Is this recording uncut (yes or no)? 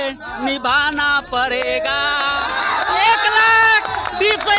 yes